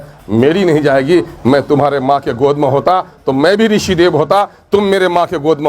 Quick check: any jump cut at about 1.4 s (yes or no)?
no